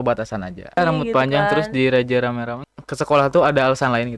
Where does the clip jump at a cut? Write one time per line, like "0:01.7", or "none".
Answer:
0:00.8
0:02.6